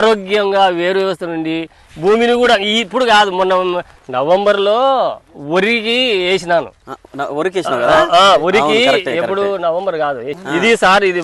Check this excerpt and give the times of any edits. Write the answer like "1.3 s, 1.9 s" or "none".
none